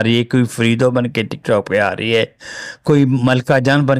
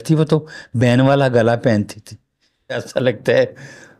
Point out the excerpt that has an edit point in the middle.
second; 1 cut; at 2.8 s

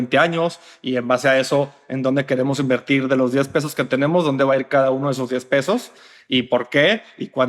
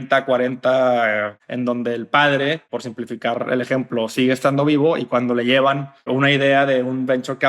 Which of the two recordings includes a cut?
second; 3 cuts; at 1.3 s, 2.7 s, 6.1 s

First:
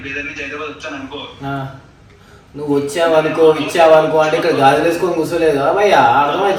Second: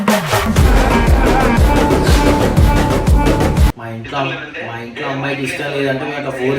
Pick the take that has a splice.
second; 1 cut; at 3.7 s

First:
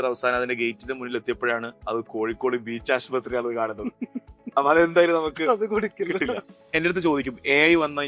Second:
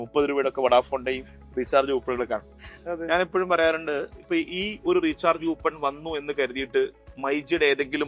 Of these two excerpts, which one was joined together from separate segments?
first; 2 cuts; at 1.7 s, 6.5 s

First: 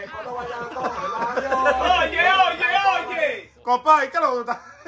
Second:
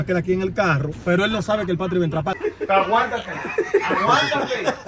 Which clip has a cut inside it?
second; 2 cuts; at 0.9 s, 2.4 s

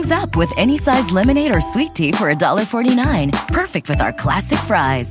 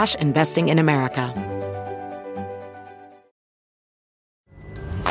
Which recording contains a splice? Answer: second; 1 cut; at 1.3 s

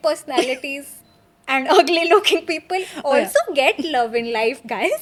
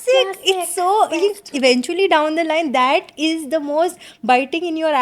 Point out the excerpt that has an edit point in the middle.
second; 1 cut; at 1.5 s

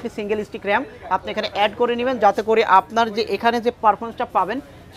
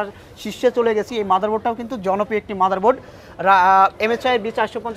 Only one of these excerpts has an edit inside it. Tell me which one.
second; 1 cut; at 1.1 s

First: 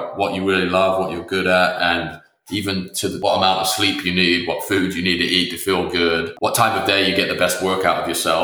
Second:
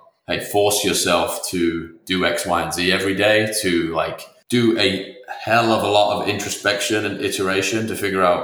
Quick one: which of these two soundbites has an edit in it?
first; 1 cut; at 3.2 s

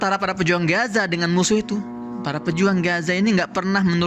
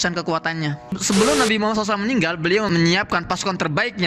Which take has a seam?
second; 2 cuts; at 0.9 s, 2.7 s

